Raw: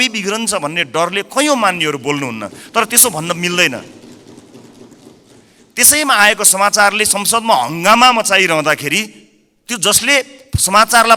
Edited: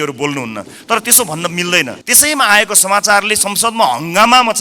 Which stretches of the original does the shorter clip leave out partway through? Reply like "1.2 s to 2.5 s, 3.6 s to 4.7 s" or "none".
3.8 s to 5.7 s